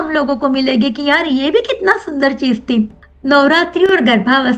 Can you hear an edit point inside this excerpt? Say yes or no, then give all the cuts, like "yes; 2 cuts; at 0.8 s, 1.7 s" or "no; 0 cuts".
no; 0 cuts